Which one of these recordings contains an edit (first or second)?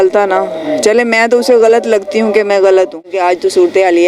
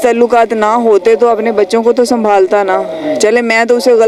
first